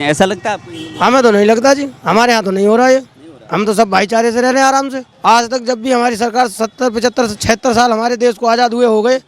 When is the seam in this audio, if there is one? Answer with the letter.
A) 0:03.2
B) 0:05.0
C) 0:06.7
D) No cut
B